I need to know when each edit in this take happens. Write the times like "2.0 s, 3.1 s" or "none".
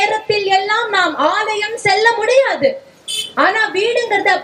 none